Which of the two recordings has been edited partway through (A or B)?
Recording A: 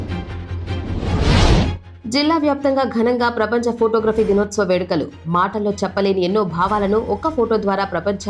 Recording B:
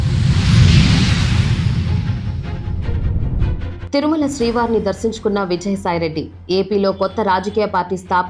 A